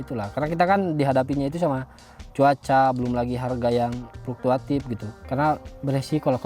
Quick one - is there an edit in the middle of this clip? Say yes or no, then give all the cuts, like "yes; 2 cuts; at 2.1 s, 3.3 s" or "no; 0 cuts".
no; 0 cuts